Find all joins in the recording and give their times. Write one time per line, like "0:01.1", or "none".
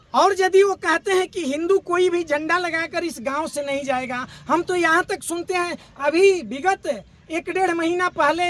none